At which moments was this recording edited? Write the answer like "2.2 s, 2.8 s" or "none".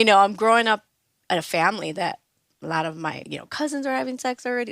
1.2 s, 3.3 s